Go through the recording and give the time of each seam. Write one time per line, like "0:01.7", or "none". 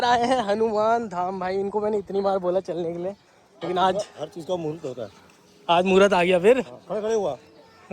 none